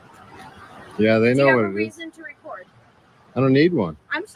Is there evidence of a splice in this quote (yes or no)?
no